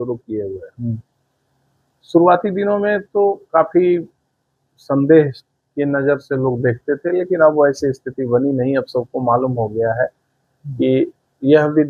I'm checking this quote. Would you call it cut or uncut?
uncut